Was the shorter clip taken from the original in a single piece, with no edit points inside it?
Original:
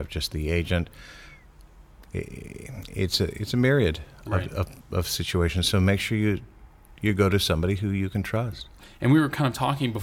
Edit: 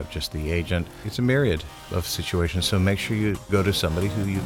no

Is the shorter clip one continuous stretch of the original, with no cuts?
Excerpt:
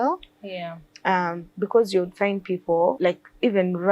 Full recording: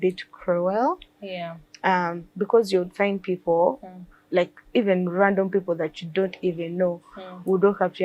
no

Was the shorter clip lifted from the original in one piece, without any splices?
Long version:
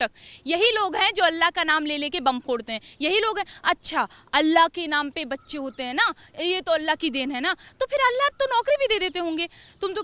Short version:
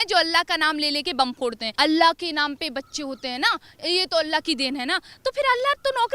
no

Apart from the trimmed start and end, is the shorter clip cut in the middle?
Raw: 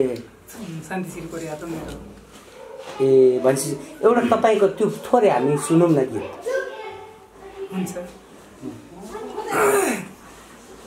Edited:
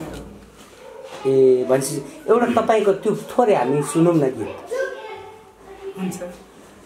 no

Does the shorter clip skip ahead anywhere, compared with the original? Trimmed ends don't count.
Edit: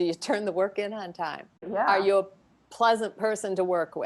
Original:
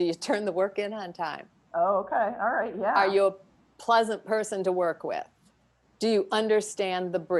yes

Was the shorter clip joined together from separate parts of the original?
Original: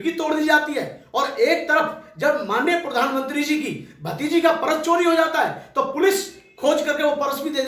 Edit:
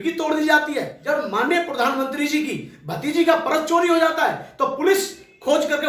yes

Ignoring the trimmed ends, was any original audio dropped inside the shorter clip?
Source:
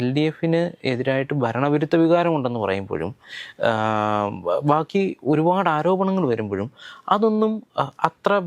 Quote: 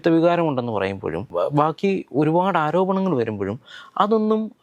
yes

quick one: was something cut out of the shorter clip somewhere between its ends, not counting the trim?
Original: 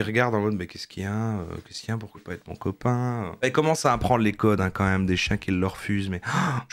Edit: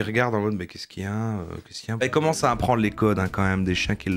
yes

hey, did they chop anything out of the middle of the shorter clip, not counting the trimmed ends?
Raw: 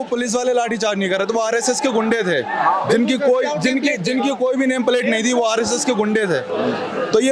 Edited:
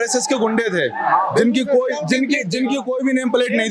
no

